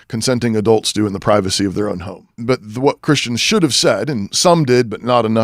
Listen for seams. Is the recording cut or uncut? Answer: cut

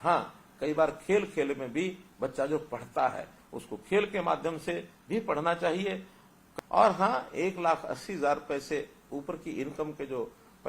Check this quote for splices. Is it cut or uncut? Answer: cut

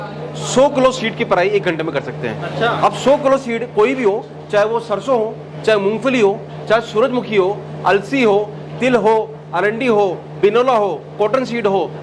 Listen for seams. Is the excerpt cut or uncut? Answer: uncut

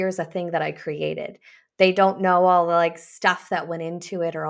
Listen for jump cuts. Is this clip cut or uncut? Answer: uncut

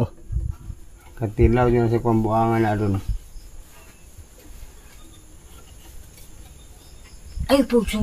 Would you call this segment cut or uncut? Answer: uncut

